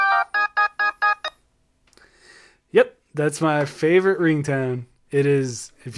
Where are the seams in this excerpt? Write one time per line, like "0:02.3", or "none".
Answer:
0:01.1